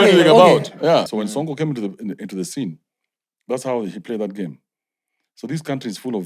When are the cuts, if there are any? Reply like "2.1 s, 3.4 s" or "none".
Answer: 1.1 s